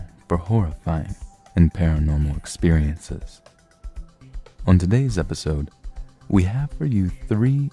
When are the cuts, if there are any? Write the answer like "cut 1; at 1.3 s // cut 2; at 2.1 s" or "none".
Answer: cut 1; at 5.3 s